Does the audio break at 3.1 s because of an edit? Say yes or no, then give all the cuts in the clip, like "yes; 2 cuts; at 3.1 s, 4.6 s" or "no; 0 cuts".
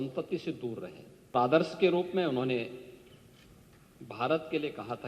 no; 1 cut; at 1.3 s